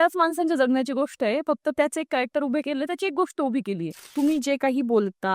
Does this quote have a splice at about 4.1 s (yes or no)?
yes